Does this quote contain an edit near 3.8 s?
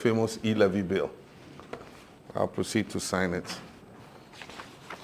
yes; 1 cut; at 3.8 s

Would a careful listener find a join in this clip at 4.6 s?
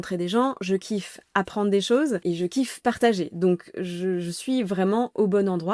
no; 1 cut; at 2.2 s

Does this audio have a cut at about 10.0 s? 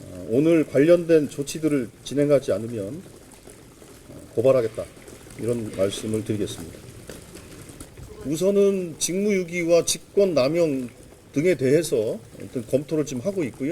no; 1 cut; at 8.0 s

